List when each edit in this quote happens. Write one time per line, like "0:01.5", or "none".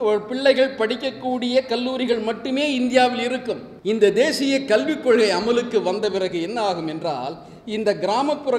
0:03.7